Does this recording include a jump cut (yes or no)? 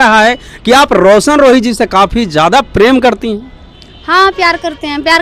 no